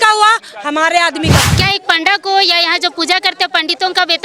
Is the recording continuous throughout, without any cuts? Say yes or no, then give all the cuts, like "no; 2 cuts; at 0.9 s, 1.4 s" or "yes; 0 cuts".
no; 1 cut; at 1.4 s